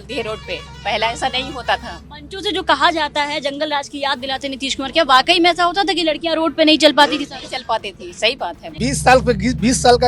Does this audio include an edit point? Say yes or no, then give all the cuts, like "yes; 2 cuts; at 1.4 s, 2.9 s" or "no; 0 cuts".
yes; 1 cut; at 8.6 s